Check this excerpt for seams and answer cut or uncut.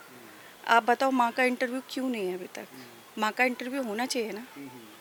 uncut